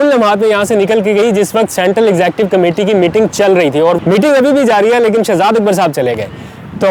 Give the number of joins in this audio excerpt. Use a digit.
0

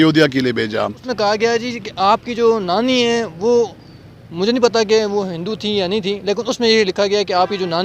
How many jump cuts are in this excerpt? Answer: 1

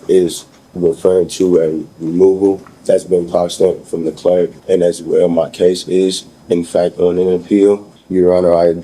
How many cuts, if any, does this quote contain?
3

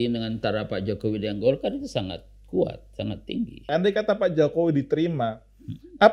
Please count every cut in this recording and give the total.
1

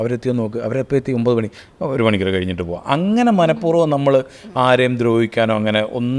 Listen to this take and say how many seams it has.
0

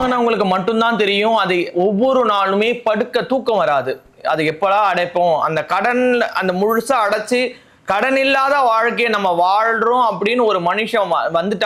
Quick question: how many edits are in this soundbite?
0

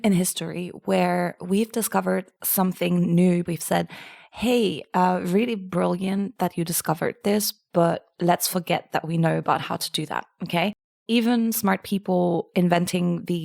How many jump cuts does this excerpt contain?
2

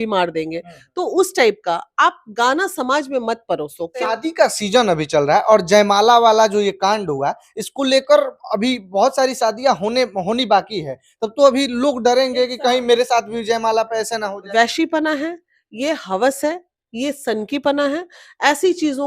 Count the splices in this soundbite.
2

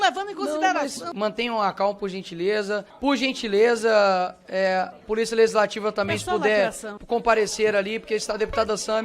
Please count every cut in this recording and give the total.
3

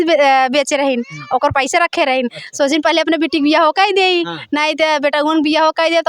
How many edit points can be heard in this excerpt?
0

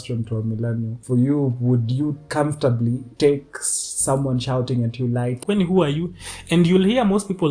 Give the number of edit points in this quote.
4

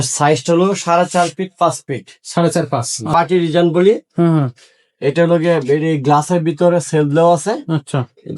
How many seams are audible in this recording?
1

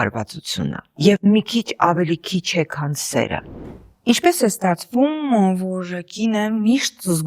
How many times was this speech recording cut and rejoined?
1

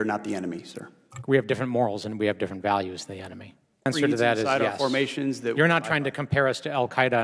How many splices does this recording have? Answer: 1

